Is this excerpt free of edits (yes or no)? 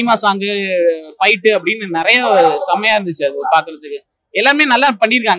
yes